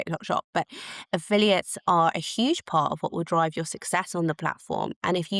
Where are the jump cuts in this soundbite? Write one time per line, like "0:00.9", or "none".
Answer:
none